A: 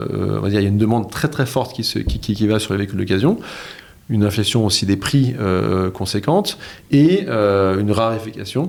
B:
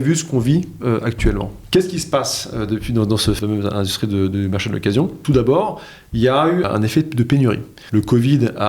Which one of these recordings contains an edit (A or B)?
B